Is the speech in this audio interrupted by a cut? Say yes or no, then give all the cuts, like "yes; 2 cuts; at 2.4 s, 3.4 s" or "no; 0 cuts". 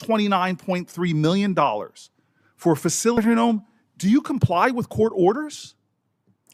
yes; 1 cut; at 3.2 s